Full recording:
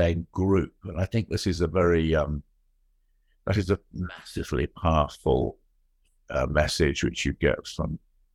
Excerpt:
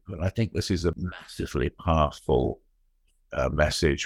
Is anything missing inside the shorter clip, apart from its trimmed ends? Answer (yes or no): yes